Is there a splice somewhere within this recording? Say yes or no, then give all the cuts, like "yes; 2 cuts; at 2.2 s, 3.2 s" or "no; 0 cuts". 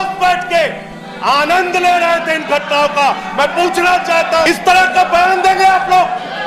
yes; 1 cut; at 4.5 s